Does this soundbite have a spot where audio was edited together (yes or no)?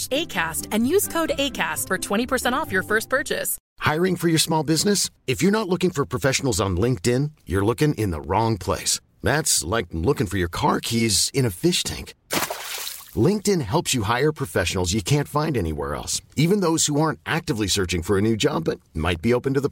yes